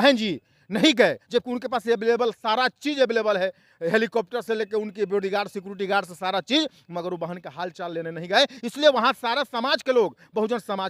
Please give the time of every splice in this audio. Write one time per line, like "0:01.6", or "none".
none